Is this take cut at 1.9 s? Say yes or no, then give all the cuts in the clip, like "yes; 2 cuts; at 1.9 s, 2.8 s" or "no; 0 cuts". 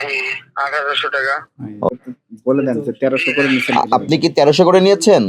yes; 1 cut; at 1.9 s